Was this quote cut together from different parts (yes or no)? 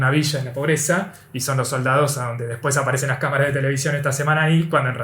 no